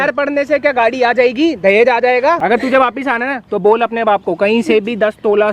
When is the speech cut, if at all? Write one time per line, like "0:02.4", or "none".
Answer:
0:02.4